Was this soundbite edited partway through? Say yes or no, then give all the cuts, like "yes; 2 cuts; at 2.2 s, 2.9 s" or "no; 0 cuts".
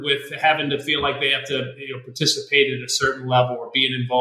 no; 0 cuts